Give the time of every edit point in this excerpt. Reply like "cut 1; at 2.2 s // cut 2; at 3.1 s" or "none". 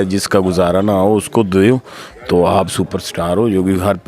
none